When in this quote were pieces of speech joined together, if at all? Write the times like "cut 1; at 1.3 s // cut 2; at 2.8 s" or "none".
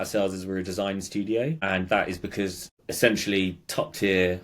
cut 1; at 1.6 s // cut 2; at 2.7 s